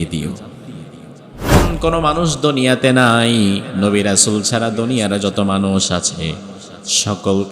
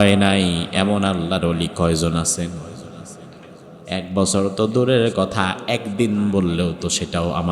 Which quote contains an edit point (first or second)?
first